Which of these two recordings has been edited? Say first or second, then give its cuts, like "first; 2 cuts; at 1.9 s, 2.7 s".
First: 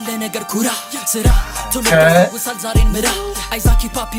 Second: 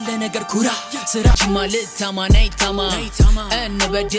second; 1 cut; at 1.4 s